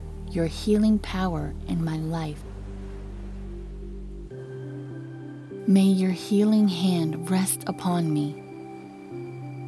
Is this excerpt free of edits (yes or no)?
no